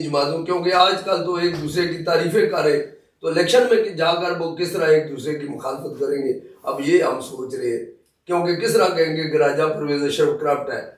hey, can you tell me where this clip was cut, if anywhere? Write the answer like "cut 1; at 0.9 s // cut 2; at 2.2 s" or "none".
none